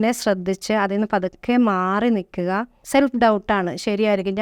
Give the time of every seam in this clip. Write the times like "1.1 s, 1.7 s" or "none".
2.8 s

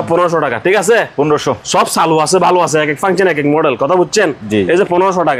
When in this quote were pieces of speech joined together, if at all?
none

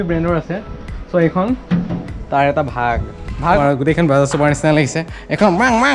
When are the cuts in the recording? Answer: 3.6 s

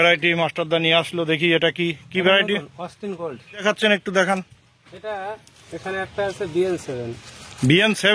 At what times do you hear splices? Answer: 3.5 s

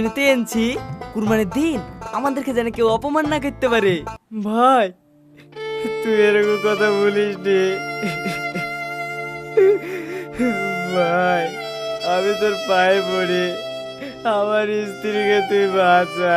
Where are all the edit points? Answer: 4.4 s

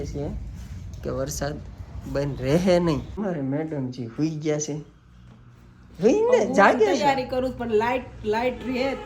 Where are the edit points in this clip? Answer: 3.1 s

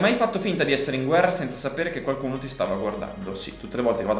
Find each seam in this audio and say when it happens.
none

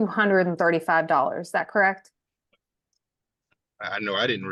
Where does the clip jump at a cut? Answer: none

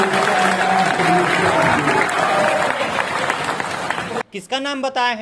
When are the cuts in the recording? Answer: none

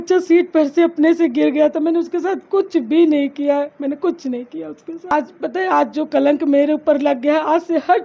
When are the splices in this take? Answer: 5.1 s

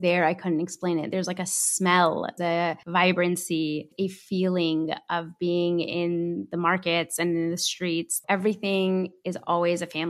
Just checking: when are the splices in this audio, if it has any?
2.6 s, 3.9 s, 8.1 s

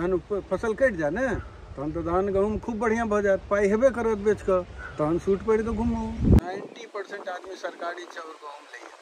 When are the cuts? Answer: 6.4 s

